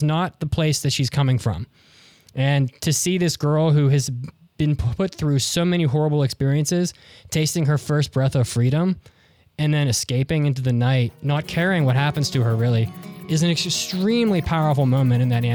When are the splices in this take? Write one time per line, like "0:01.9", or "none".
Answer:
none